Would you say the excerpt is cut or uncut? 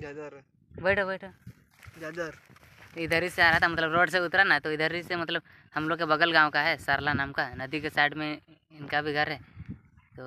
uncut